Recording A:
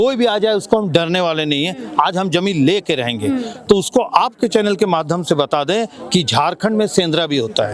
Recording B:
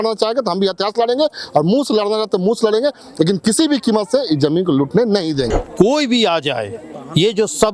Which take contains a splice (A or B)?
B